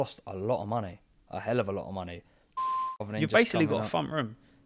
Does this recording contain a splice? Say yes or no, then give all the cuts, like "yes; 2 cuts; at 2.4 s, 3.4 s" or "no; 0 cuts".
yes; 1 cut; at 2.6 s